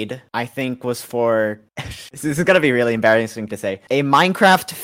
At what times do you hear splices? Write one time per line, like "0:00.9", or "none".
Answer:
none